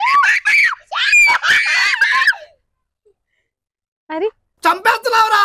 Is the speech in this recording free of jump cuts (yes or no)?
yes